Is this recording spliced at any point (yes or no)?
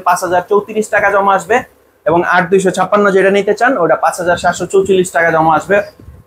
no